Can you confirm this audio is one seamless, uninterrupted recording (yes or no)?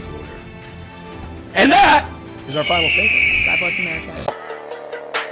no